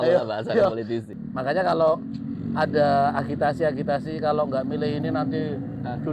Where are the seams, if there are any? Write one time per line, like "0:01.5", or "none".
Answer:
0:01.1